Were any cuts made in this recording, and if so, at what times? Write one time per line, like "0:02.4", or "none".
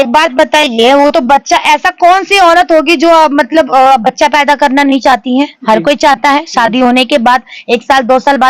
none